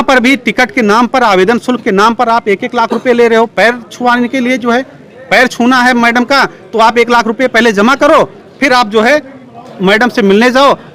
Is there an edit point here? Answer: no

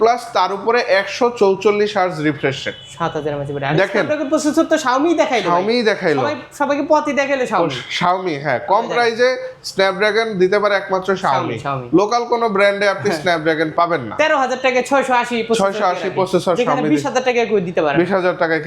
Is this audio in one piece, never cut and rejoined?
yes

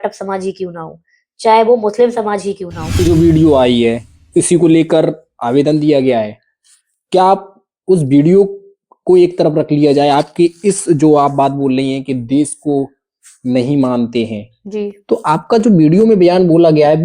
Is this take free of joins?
no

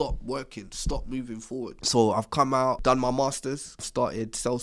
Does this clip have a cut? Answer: yes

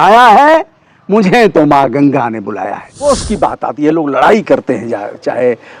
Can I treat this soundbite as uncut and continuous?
no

